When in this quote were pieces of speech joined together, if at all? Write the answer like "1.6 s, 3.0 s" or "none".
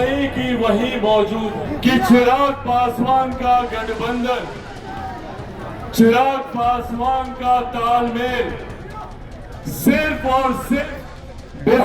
1.7 s